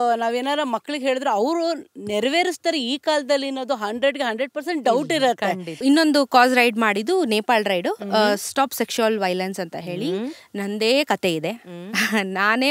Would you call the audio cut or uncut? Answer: cut